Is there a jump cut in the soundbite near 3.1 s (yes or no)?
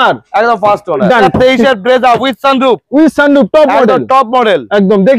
no